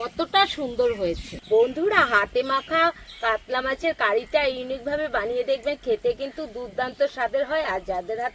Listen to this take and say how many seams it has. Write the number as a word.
one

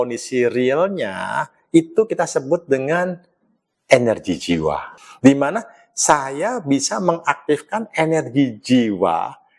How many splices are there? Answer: one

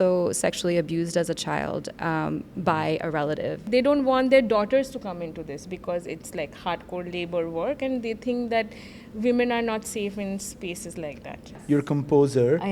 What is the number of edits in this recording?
two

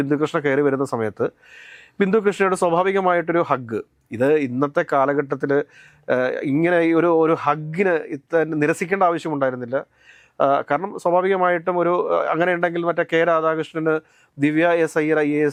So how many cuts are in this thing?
zero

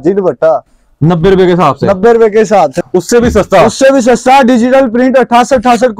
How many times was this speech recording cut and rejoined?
one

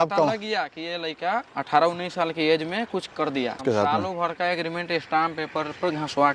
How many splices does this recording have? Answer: one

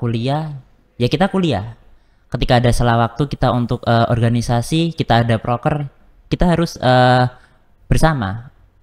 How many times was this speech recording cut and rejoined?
zero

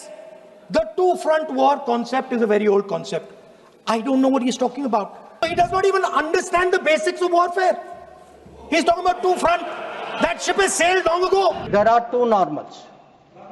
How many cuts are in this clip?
two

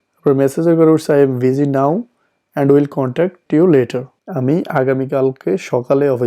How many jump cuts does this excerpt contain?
two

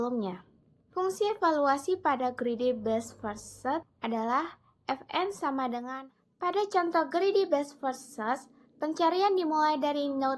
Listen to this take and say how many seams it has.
one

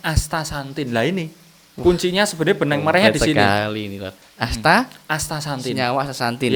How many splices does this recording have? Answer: zero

